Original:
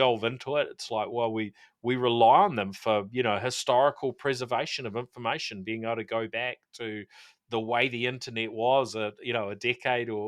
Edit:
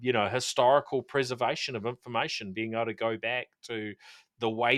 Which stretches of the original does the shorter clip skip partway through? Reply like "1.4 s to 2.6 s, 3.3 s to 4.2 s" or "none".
none

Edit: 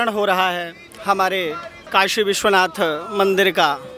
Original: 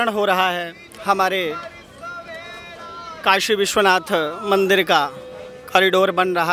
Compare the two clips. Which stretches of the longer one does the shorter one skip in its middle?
1.7 s to 3.0 s

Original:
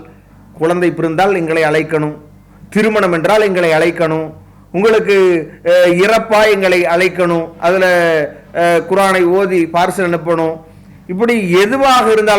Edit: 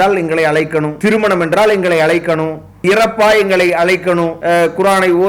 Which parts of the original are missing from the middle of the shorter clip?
2.1 s to 2.6 s, 4.6 s to 6.0 s, 7.5 s to 8.5 s

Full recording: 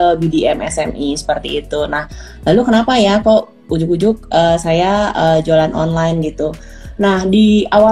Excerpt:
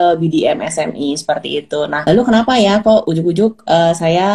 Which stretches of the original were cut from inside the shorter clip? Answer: 2.0 s to 2.4 s, 3.5 s to 3.7 s

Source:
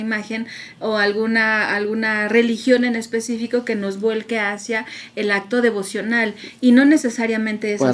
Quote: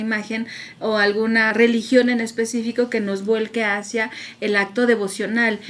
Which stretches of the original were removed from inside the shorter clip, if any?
1.5 s to 2.3 s

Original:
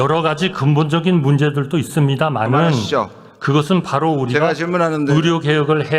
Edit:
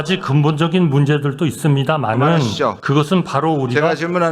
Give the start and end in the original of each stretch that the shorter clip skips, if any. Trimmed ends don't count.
3.1 s to 3.4 s

